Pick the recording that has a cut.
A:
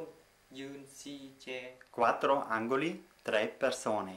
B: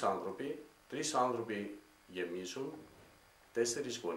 A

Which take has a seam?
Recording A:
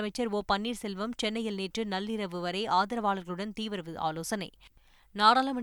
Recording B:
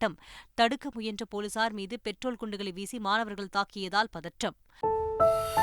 B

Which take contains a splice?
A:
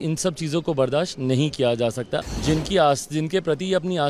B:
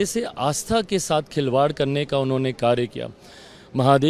A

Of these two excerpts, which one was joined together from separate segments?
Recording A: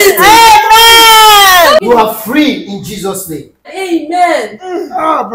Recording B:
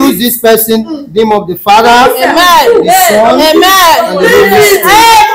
A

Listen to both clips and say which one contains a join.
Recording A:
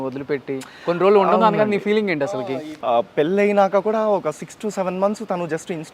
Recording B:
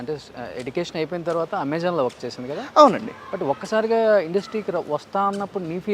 A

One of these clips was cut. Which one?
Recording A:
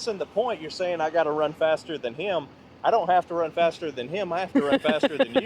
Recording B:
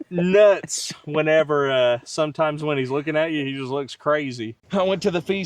B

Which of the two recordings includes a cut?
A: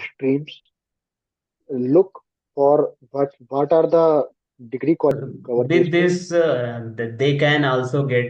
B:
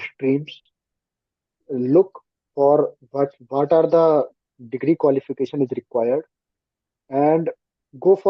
A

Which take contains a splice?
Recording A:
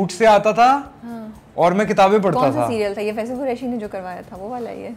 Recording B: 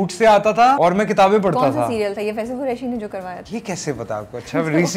B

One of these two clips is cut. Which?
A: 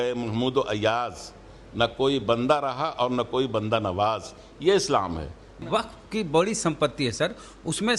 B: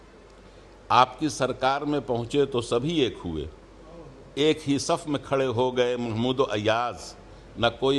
A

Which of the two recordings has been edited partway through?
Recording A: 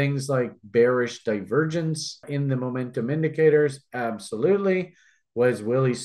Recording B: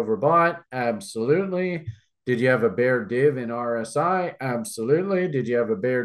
A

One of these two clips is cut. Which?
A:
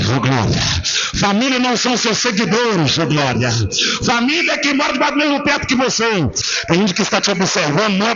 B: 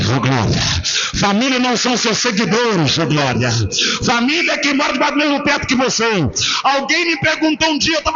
A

